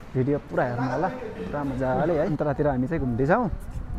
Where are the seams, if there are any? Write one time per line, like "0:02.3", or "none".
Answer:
0:01.9